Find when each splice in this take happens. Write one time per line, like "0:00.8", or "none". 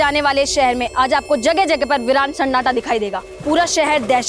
0:03.3